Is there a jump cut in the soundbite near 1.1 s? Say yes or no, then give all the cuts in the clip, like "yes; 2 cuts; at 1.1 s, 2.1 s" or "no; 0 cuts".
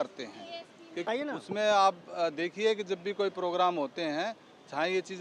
yes; 1 cut; at 1.1 s